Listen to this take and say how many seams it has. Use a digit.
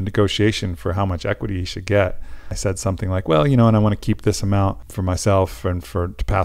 2